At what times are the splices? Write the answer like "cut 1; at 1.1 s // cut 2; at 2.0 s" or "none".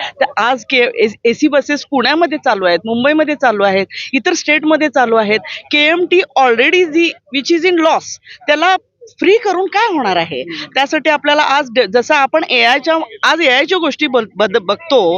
none